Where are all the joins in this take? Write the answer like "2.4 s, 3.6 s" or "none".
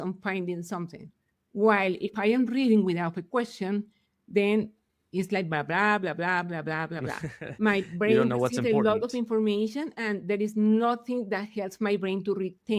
none